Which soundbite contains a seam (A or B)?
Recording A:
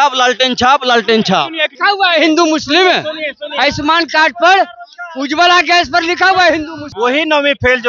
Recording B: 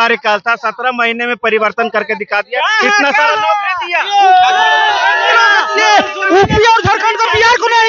A